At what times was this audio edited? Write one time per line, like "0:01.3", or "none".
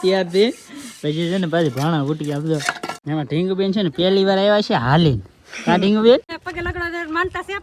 0:02.9
0:06.4